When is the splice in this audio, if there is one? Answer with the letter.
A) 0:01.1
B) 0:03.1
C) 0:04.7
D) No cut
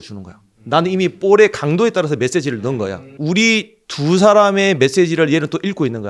B